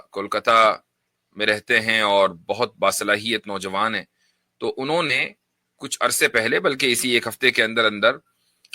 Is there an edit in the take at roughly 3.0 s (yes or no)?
no